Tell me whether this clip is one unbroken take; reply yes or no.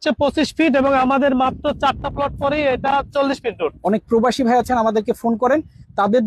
no